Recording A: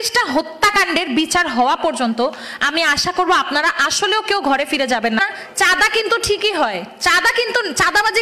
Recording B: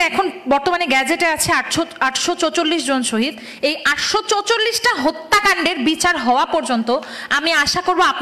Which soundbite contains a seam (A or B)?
A